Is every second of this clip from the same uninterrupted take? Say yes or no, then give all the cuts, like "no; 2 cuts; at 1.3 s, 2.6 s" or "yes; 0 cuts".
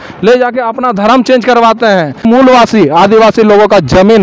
no; 1 cut; at 2.2 s